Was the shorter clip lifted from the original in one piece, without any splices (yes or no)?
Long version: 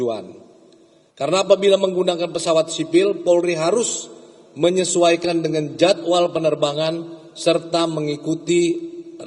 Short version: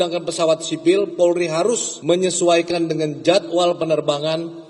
no